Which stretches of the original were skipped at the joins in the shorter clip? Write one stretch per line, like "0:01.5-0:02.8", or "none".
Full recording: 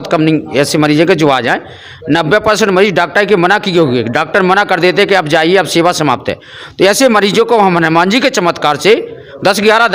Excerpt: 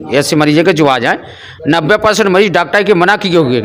none